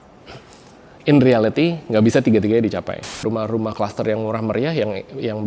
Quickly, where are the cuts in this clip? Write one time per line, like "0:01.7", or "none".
0:03.2